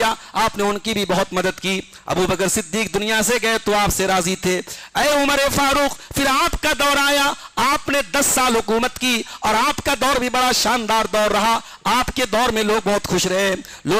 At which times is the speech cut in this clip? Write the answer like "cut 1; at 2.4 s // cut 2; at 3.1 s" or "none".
none